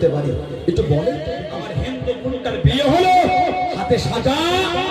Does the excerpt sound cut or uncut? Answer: cut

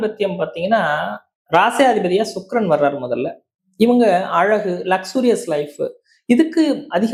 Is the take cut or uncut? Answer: uncut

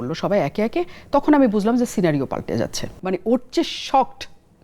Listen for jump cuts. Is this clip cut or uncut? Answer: cut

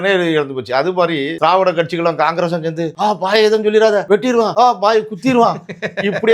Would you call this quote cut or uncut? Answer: cut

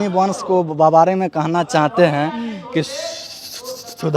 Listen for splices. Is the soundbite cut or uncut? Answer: uncut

